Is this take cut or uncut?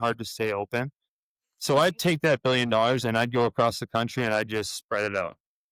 uncut